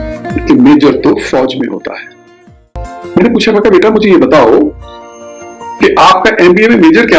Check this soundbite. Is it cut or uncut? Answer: cut